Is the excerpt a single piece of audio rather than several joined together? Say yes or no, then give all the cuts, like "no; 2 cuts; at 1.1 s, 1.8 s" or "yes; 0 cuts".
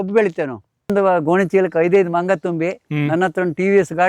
no; 1 cut; at 0.9 s